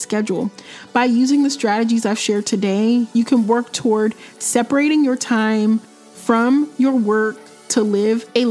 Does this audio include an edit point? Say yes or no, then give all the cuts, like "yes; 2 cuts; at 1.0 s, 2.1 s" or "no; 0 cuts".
no; 0 cuts